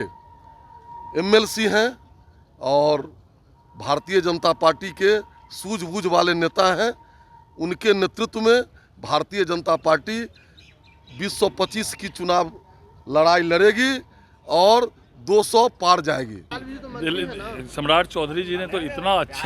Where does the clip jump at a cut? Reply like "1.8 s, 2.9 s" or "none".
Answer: 16.5 s